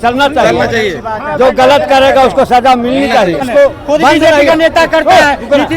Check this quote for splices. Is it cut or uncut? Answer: cut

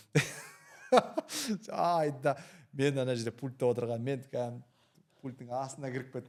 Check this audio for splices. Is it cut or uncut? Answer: uncut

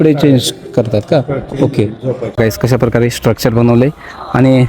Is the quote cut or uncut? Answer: cut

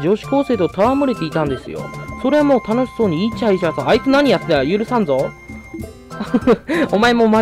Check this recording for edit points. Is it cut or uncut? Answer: uncut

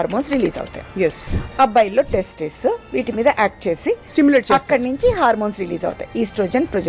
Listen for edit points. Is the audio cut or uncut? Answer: cut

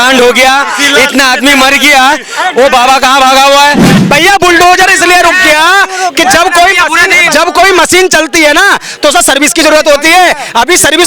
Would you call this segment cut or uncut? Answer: cut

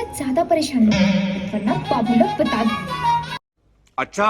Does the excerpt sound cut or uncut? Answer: cut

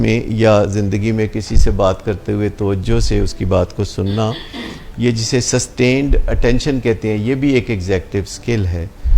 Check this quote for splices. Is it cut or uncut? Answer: uncut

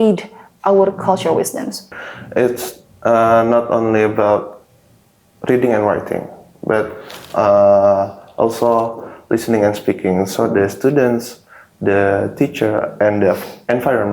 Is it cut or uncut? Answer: cut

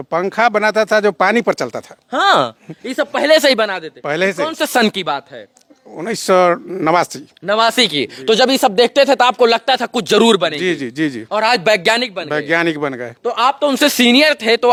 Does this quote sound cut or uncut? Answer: uncut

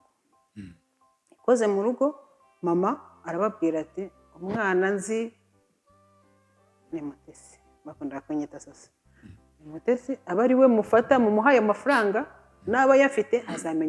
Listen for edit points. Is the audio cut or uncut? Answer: uncut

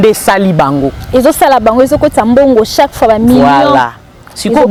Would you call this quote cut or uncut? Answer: uncut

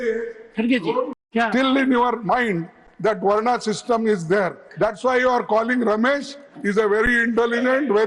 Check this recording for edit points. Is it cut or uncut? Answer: cut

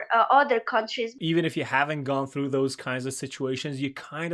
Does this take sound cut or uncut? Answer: cut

